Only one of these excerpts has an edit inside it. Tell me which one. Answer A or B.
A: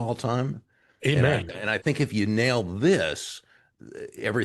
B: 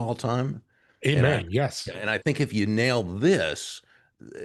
A